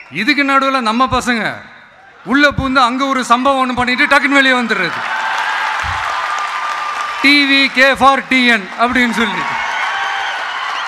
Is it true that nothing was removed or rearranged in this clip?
yes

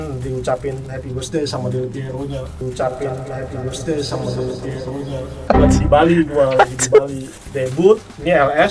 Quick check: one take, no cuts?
yes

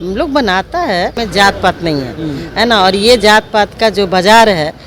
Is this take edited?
yes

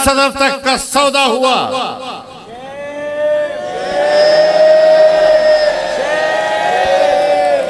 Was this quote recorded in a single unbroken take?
yes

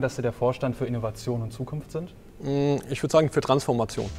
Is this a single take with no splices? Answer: no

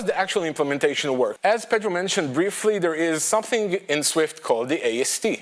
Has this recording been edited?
yes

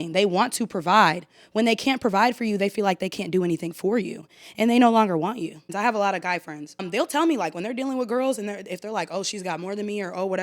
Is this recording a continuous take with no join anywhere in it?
no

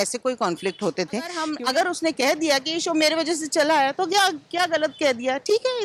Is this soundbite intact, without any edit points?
no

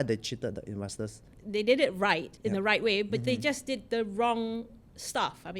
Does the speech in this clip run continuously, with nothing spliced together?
no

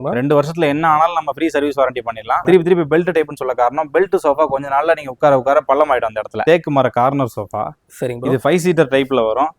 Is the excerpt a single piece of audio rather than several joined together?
no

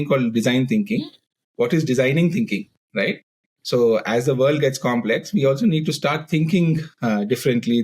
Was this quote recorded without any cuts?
yes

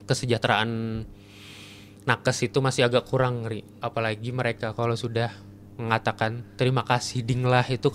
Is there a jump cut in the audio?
yes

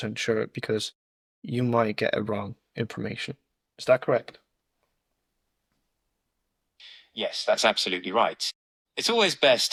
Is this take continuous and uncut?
yes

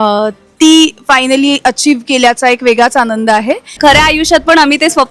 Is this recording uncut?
no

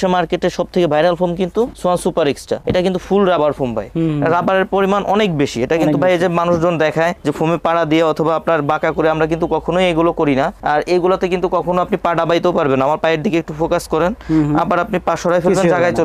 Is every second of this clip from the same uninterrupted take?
yes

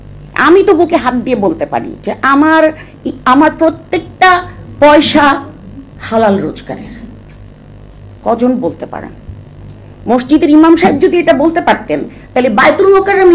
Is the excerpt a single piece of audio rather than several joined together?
yes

